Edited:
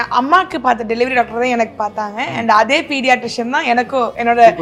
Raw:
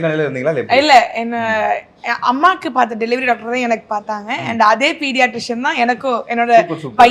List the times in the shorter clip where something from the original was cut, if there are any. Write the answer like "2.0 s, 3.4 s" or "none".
none